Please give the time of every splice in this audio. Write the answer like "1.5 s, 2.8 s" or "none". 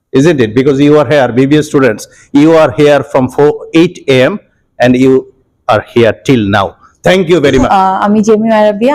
7.7 s